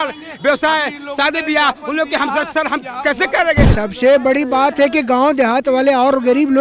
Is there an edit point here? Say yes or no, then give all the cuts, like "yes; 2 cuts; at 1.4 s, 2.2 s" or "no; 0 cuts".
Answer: yes; 1 cut; at 3.7 s